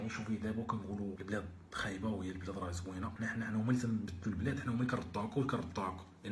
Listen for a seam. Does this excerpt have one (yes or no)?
yes